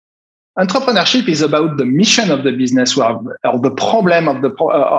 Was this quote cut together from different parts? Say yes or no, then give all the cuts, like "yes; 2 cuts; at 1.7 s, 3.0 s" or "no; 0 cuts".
no; 0 cuts